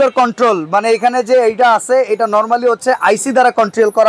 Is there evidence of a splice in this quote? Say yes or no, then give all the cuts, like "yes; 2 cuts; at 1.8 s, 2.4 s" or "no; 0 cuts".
no; 0 cuts